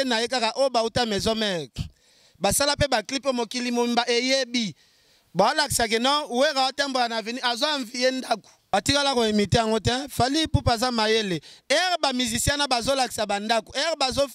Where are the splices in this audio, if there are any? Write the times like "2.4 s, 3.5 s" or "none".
8.7 s